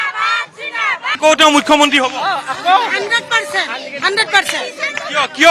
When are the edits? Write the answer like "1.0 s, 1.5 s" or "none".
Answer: 1.2 s